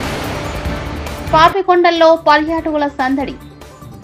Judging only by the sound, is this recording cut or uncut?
uncut